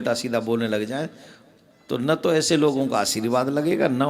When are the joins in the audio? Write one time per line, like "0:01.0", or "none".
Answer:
none